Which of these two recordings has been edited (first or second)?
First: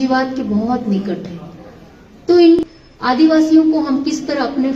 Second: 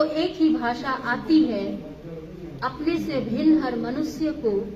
first